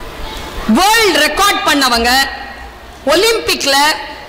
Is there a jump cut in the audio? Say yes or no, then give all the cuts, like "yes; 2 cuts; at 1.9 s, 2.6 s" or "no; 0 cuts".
no; 0 cuts